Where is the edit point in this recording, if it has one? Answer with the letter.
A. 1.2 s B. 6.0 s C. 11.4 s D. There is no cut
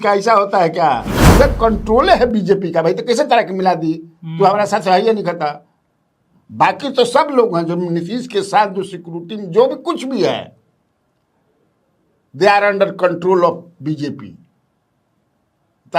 A